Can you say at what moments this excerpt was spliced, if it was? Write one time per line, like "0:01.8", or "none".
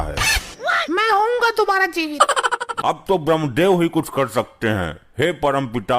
0:02.7